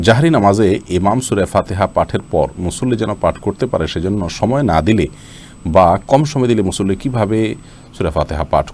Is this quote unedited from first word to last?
yes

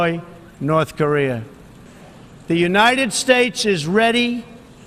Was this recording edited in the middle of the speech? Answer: yes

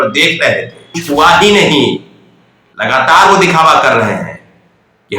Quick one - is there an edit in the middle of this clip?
yes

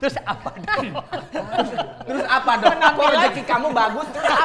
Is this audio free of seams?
yes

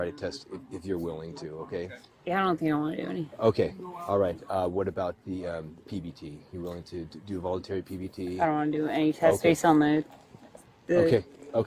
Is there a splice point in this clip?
no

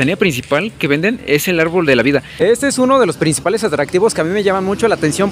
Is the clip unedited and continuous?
no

